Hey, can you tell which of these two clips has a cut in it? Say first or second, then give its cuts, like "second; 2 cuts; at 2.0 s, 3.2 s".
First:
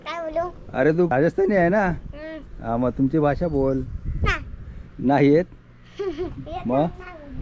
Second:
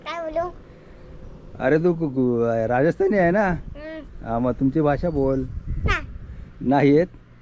first; 1 cut; at 1.1 s